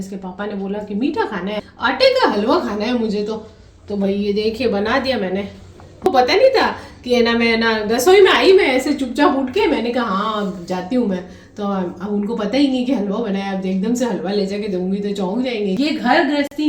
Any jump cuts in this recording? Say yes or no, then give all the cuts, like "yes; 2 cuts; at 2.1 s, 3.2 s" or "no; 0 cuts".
yes; 3 cuts; at 1.7 s, 6.1 s, 15.8 s